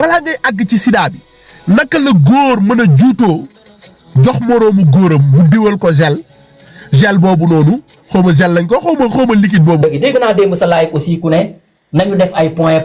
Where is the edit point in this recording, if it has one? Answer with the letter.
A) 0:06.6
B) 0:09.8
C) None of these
B